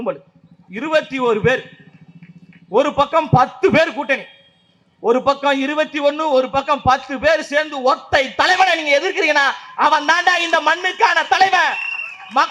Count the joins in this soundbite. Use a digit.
0